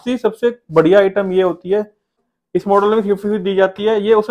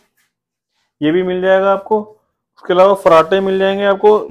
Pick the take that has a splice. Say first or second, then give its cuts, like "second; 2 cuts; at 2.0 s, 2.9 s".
first; 1 cut; at 2.2 s